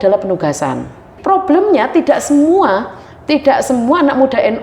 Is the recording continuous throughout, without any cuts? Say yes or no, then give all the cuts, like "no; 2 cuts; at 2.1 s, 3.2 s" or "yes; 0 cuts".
no; 1 cut; at 1.1 s